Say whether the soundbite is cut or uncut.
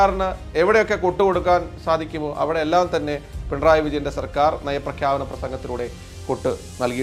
uncut